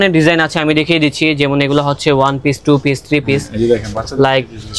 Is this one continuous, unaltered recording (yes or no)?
yes